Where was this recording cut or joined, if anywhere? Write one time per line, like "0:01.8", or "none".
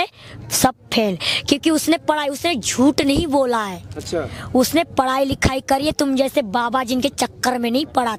none

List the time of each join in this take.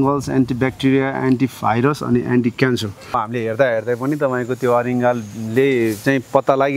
0:03.2

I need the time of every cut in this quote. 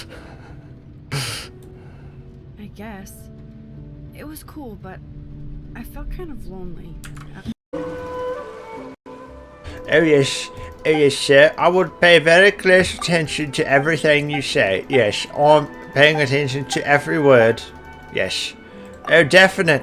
0:07.6
0:09.1

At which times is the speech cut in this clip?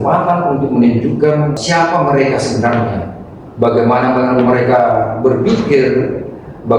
0:01.6

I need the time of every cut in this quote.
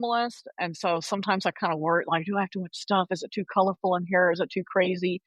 none

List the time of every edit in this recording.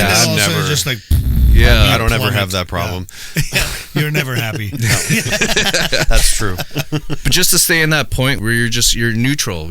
0:08.4

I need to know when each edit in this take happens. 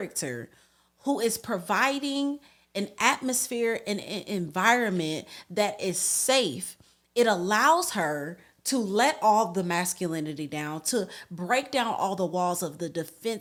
none

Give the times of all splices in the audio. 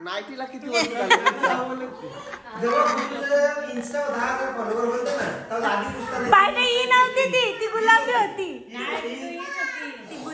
none

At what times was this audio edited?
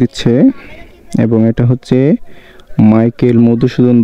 none

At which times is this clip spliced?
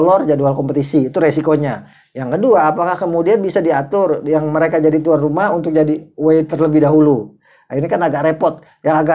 none

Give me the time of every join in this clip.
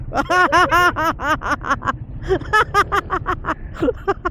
none

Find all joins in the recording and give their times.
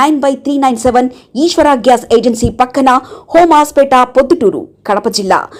none

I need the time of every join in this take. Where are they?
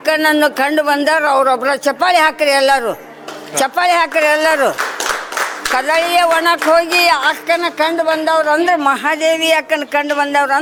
none

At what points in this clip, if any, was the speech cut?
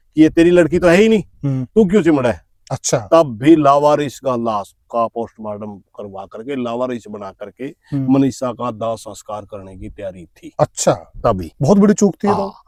none

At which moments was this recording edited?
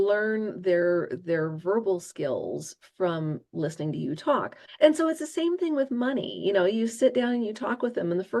0:04.6

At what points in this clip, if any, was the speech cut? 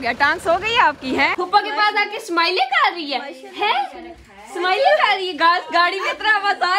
0:01.3

